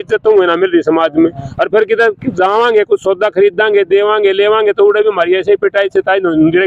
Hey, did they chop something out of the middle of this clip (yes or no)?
no